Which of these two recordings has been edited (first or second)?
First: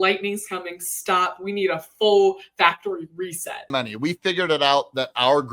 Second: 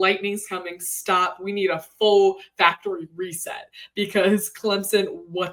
first